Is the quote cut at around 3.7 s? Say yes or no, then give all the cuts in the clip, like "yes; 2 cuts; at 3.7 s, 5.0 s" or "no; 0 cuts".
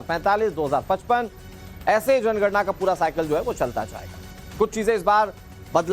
yes; 1 cut; at 3.7 s